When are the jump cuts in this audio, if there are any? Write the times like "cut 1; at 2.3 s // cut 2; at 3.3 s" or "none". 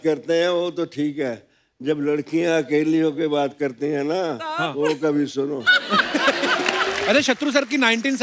cut 1; at 7.0 s